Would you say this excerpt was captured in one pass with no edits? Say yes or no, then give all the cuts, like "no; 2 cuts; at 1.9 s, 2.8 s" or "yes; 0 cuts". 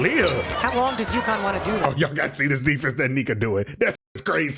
no; 1 cut; at 1.8 s